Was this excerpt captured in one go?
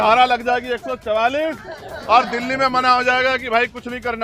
yes; 0 cuts

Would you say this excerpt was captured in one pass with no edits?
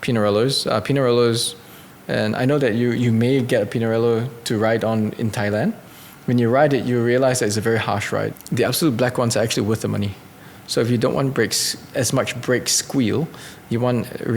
no; 1 cut; at 8.4 s

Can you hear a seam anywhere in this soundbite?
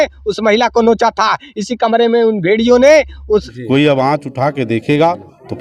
yes; 1 cut; at 3.5 s

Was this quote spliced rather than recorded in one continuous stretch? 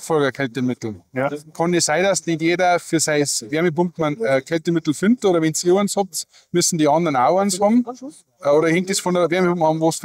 no; 0 cuts

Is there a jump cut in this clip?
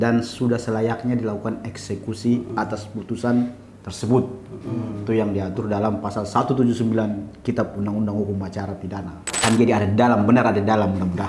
yes; 1 cut; at 9.4 s

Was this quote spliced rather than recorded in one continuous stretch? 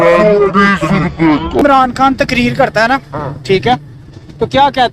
yes; 1 cut; at 1.6 s

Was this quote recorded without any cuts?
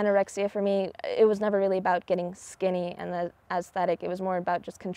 no; 1 cut; at 0.9 s

